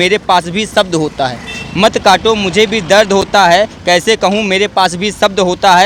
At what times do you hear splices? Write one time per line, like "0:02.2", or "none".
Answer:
none